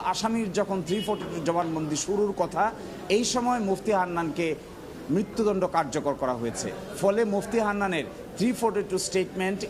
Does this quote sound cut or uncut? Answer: uncut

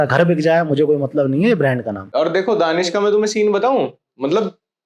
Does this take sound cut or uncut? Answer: cut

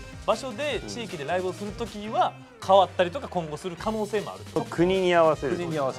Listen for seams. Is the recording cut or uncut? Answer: cut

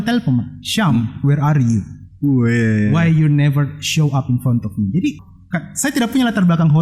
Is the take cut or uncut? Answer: cut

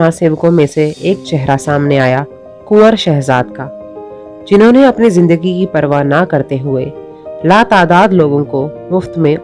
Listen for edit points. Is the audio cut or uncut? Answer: uncut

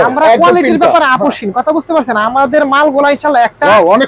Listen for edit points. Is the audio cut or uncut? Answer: uncut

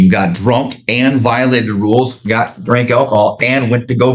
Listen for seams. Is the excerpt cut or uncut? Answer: uncut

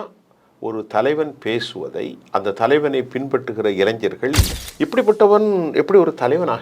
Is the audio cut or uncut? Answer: cut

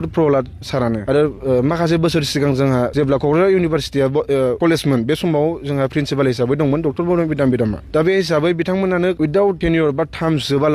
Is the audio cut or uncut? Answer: cut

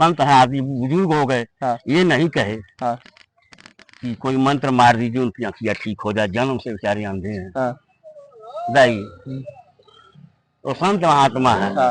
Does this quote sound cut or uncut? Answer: uncut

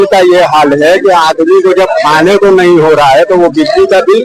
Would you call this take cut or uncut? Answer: uncut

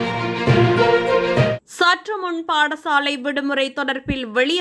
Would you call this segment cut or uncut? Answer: cut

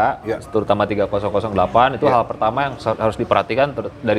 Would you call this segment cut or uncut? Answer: uncut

